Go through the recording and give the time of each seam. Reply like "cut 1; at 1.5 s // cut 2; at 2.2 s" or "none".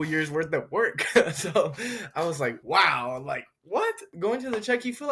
cut 1; at 2.6 s // cut 2; at 4.1 s